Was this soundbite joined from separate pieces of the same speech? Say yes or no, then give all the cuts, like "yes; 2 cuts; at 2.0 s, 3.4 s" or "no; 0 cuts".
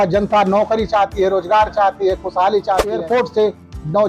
yes; 1 cut; at 2.9 s